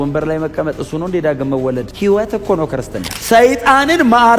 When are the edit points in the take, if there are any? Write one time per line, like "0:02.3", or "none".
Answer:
0:01.9
0:03.1